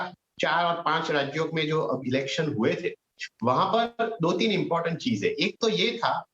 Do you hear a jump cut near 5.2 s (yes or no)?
yes